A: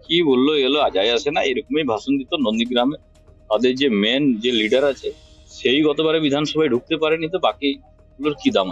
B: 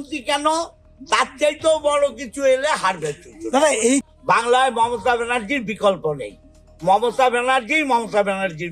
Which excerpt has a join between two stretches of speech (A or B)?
B